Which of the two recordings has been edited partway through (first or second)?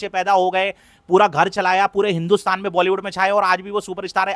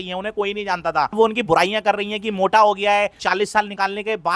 second